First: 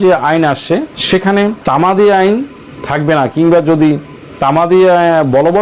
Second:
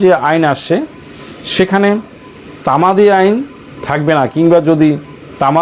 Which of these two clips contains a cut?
first; 2 cuts; at 1.0 s, 1.6 s

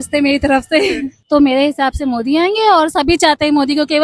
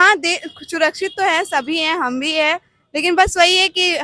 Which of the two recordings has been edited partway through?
first; 1 cut; at 1.1 s

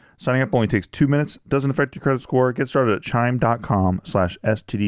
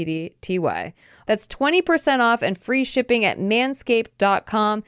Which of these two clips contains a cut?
second; 1 cut; at 1.1 s

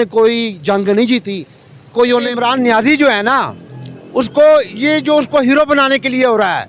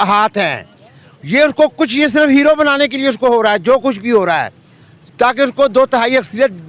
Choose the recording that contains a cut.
first; 1 cut; at 2.3 s

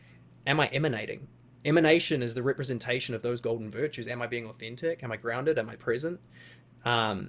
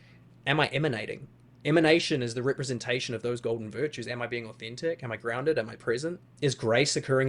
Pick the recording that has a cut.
second; 1 cut; at 6.3 s

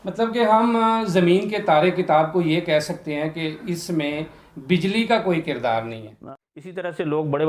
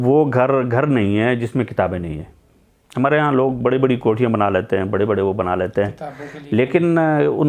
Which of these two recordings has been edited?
first; 1 cut; at 6.1 s

